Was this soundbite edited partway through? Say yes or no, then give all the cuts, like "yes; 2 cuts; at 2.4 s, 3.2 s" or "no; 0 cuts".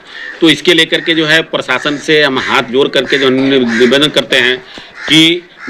no; 0 cuts